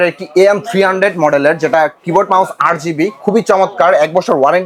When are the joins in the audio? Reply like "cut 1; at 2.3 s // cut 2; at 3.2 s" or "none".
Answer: none